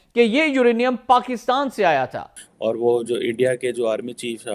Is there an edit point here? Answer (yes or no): yes